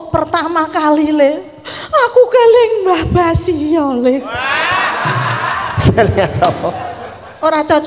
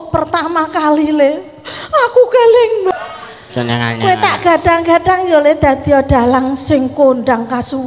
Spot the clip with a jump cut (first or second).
second